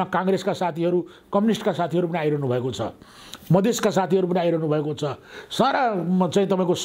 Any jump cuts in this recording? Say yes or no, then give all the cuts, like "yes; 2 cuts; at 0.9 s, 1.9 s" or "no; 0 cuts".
no; 0 cuts